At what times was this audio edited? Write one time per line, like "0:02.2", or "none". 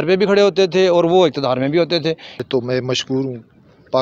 0:02.4